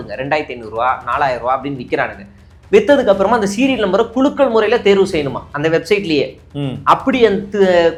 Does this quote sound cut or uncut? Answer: uncut